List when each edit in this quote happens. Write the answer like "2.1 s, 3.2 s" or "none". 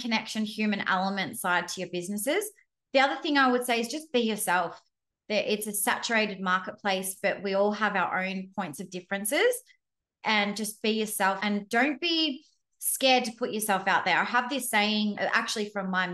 11.4 s, 15.2 s